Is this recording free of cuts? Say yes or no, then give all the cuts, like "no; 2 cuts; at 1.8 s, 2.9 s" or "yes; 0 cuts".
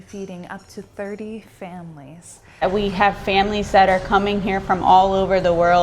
no; 1 cut; at 2.6 s